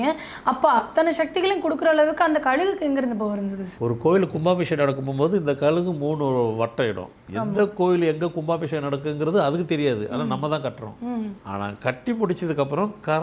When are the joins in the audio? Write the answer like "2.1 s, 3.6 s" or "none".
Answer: 3.7 s, 11.4 s

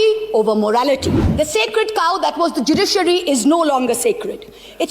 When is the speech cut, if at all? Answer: 1.2 s

